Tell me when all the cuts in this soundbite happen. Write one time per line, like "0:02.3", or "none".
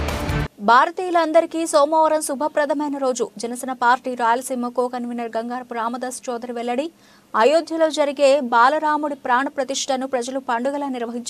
none

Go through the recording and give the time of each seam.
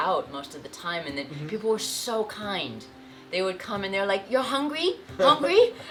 none

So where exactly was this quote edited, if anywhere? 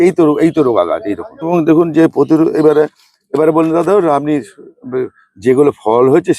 0:01.5

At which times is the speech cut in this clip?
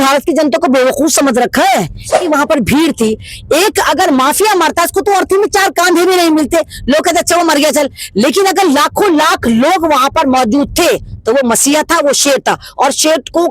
0:02.1

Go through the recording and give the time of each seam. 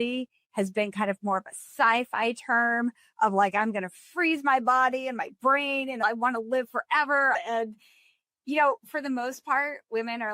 0:06.0
0:07.3

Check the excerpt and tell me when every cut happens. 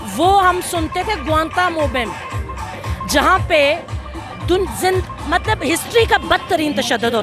none

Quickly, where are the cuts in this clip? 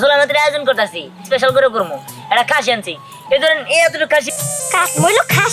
0:01.1
0:04.3

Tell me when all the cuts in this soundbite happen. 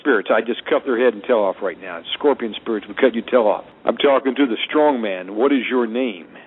0:03.7

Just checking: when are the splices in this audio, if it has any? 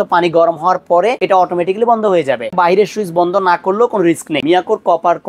0:01.2
0:02.5
0:04.4

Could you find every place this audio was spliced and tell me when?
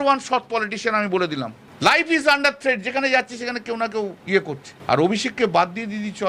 0:01.6
0:04.3

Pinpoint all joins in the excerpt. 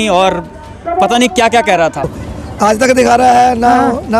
0:02.2

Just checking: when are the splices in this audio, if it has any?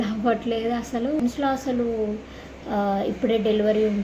0:01.2

